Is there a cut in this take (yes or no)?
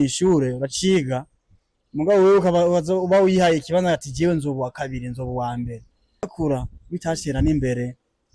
yes